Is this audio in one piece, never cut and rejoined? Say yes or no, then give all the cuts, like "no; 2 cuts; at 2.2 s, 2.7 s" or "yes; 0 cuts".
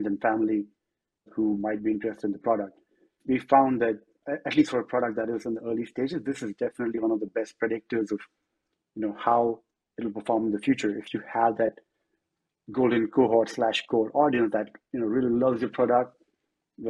no; 3 cuts; at 1.3 s, 3.2 s, 4.2 s